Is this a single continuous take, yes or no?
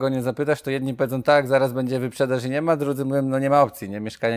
yes